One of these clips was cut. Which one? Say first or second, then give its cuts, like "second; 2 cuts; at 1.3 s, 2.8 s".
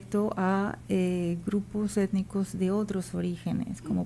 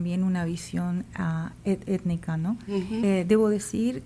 second; 1 cut; at 3.0 s